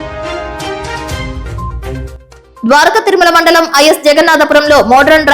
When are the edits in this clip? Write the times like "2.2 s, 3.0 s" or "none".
1.8 s